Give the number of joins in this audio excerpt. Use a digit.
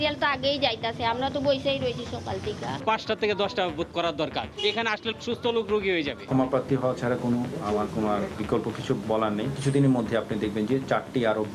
2